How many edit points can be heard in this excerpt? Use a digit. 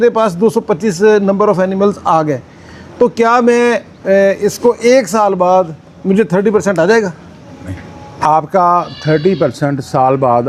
0